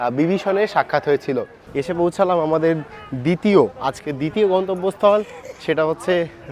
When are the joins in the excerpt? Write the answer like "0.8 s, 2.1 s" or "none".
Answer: 1.6 s